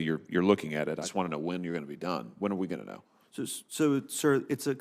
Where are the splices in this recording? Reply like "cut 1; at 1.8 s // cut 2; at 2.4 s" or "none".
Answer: cut 1; at 1.1 s